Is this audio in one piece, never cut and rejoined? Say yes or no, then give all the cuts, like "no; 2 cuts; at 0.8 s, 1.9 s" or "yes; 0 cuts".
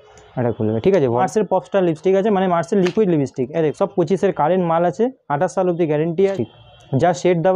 no; 3 cuts; at 1.2 s, 3.7 s, 6.4 s